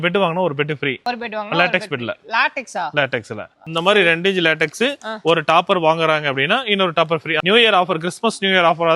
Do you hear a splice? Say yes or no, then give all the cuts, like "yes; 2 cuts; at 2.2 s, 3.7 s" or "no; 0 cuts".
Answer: yes; 2 cuts; at 3.6 s, 7.4 s